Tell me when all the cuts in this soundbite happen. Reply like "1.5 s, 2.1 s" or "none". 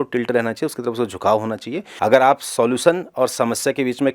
1.8 s